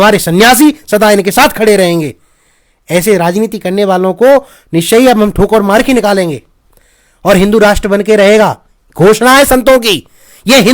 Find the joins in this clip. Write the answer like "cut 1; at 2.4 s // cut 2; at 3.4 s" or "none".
none